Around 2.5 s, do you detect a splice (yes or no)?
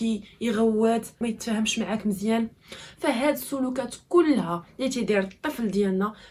no